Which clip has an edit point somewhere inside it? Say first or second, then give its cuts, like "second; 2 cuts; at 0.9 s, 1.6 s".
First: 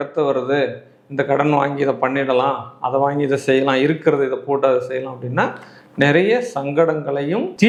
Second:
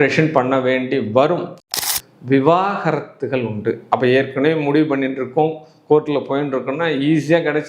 second; 1 cut; at 1.7 s